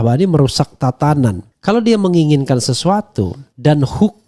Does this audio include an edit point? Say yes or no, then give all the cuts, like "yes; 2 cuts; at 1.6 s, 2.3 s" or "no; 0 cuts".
yes; 1 cut; at 1.5 s